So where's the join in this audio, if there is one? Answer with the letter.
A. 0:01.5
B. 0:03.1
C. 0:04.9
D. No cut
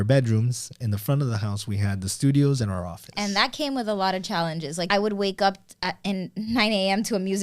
C